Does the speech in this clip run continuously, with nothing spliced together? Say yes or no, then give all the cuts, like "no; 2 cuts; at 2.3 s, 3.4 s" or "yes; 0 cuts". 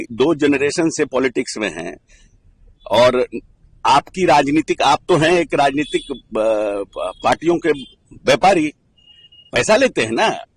yes; 0 cuts